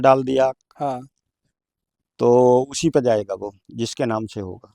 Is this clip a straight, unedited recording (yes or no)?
yes